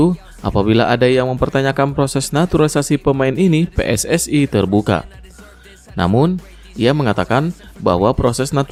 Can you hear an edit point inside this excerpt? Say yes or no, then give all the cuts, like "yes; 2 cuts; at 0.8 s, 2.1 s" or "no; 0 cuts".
no; 0 cuts